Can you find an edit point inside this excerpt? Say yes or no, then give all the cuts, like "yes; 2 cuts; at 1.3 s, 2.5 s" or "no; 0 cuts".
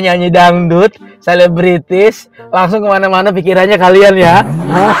no; 0 cuts